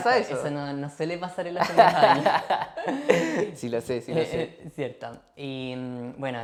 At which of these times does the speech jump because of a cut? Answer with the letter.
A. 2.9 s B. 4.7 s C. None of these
C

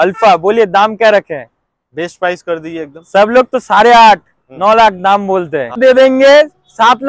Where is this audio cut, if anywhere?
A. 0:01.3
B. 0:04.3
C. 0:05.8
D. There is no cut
C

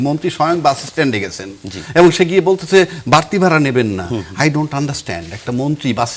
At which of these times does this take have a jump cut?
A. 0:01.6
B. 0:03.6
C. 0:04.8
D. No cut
D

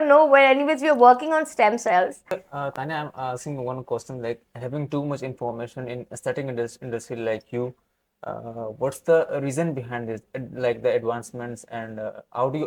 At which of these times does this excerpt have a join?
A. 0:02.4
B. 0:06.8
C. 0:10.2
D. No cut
A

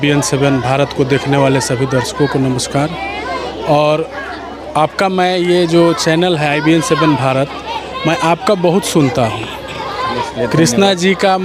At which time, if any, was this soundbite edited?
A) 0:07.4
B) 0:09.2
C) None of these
C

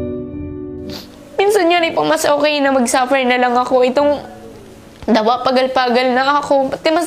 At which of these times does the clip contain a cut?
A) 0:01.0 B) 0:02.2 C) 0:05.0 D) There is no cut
A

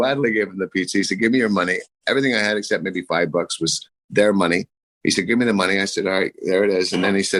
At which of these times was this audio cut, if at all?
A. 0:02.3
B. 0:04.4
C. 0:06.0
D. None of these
D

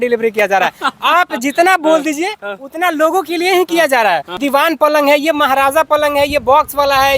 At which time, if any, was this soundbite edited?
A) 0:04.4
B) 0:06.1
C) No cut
A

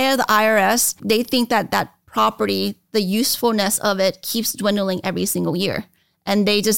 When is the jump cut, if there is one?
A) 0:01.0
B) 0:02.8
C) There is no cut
A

